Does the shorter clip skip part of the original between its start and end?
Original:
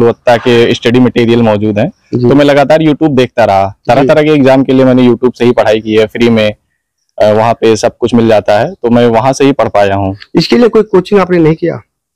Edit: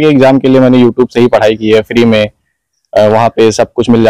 no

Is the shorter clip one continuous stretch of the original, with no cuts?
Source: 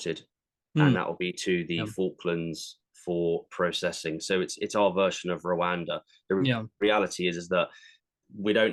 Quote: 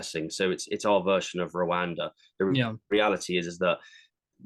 yes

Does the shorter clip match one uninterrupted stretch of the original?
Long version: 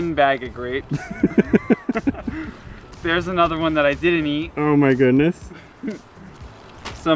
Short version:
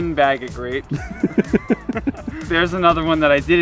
no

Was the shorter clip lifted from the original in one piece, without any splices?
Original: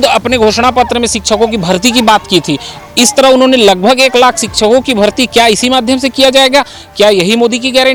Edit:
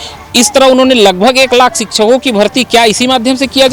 yes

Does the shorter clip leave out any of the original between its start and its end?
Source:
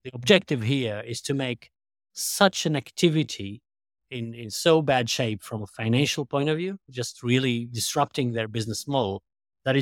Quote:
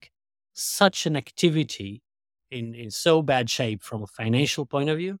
no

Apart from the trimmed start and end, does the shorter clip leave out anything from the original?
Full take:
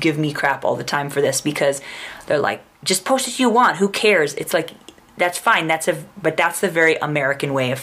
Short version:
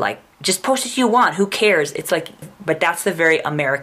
yes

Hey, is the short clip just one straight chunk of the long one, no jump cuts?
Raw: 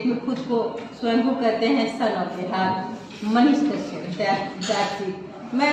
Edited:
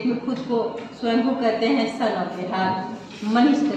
yes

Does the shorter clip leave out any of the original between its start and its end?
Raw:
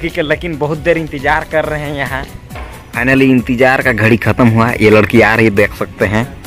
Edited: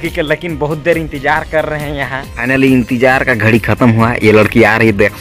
yes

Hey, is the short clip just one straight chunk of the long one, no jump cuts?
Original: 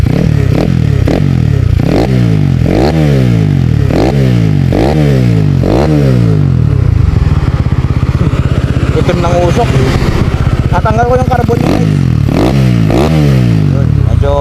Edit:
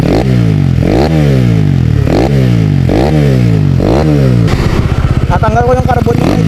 no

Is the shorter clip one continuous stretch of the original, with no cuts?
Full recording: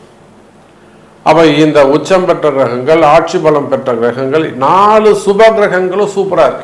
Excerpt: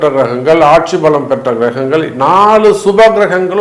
yes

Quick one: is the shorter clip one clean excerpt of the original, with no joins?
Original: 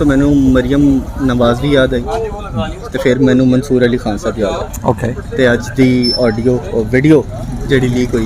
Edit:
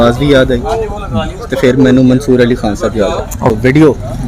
no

